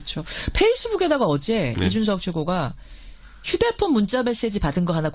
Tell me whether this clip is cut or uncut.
cut